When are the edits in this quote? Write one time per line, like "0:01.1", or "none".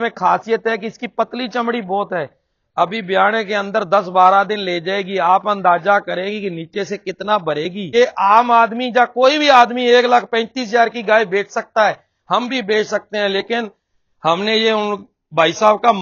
0:07.8